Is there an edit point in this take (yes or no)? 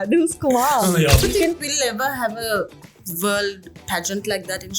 yes